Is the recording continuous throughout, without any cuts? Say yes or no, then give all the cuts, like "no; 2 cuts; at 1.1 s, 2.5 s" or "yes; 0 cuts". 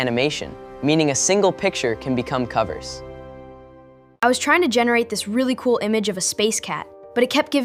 yes; 0 cuts